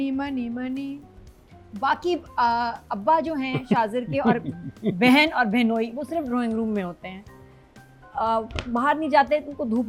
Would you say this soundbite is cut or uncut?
uncut